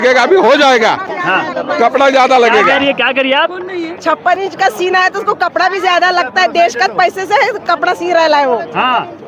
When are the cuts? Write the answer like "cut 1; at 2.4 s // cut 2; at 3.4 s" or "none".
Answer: none